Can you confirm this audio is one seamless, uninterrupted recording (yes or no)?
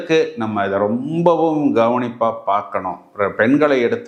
yes